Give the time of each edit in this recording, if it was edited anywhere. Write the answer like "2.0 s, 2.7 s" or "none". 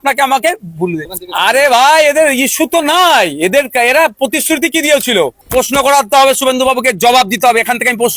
1.1 s, 5.4 s